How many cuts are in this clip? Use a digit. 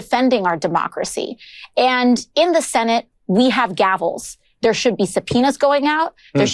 0